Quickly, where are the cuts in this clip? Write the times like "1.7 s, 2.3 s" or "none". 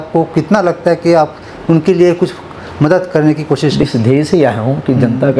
3.9 s